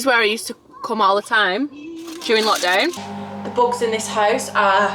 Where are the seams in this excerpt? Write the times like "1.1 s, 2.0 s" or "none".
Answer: 3.0 s